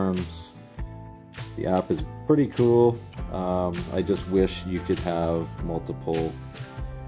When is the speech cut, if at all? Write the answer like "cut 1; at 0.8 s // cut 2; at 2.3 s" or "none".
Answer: none